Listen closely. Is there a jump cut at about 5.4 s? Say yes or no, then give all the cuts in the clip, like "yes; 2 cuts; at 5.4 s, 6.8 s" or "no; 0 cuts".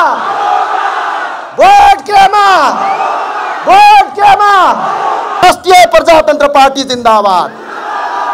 yes; 1 cut; at 5.4 s